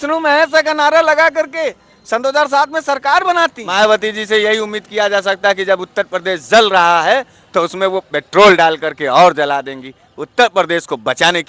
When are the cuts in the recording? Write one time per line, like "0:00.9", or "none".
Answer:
0:03.6